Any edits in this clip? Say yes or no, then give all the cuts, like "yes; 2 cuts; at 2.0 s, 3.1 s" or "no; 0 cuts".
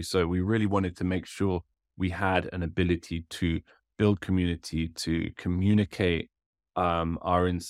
no; 0 cuts